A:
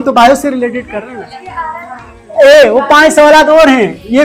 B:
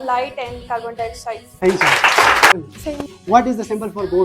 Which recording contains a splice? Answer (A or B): B